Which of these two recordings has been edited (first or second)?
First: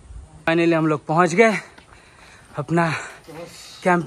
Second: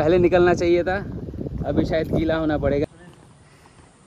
second